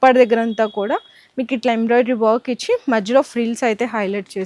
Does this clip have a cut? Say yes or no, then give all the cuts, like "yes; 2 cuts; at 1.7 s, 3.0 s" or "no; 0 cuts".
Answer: no; 0 cuts